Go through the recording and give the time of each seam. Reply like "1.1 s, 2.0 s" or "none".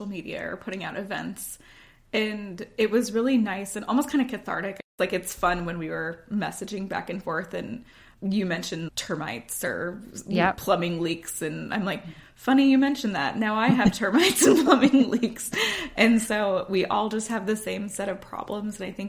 4.8 s, 8.0 s, 8.9 s